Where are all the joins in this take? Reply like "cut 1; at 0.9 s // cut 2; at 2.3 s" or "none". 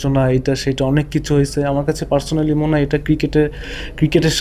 none